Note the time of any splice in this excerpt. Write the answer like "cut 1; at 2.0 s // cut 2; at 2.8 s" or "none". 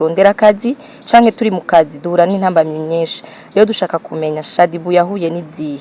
none